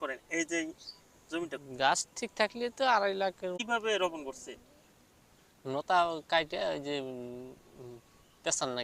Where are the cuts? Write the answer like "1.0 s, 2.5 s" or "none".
3.6 s